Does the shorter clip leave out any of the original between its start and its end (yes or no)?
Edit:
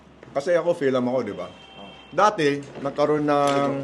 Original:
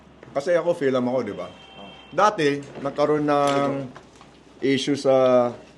no